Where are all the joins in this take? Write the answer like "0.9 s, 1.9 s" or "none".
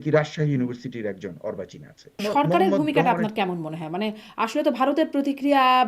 2.2 s